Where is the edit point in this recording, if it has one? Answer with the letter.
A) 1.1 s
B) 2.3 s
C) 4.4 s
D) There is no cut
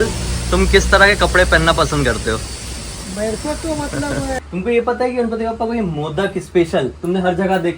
C